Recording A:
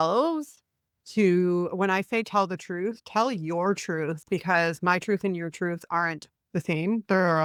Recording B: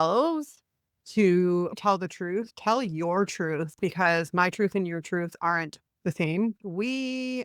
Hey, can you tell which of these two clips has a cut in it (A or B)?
B